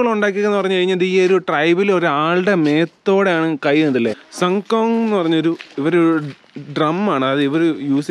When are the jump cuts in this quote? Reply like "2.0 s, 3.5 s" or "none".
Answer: 4.2 s